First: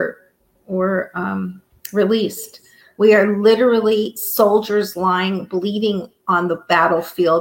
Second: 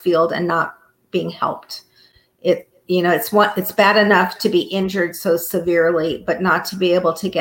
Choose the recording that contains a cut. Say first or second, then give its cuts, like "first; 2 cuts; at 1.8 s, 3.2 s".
first; 1 cut; at 2.8 s